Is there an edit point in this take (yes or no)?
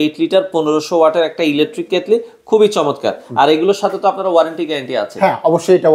no